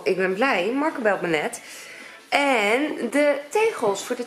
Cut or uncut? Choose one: uncut